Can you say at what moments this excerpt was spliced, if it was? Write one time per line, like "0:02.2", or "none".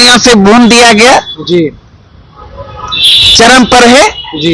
none